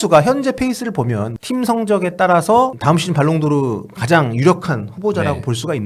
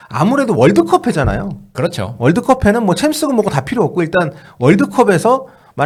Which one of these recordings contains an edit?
first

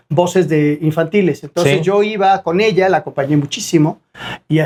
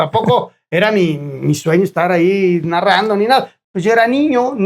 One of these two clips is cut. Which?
second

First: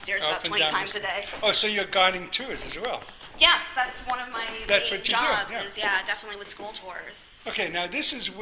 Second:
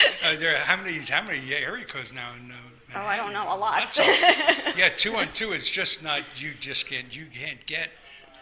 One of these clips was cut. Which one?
second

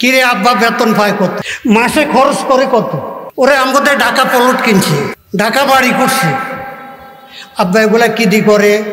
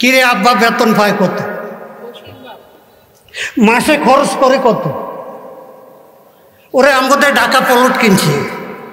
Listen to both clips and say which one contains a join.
first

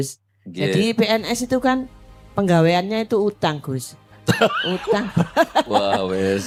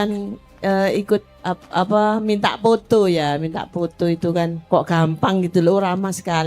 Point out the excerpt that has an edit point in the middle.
second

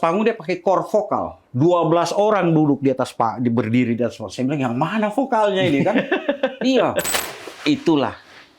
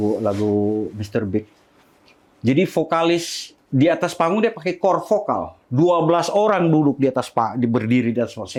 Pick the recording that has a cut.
first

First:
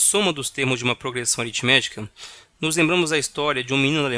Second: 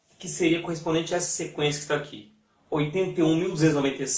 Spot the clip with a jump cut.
second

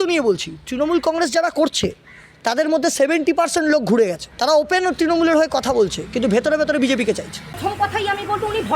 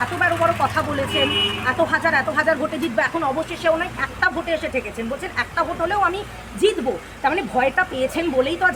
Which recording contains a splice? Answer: first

